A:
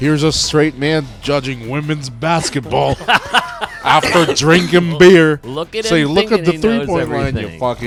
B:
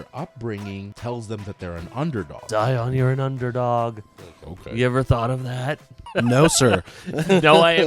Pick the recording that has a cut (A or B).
B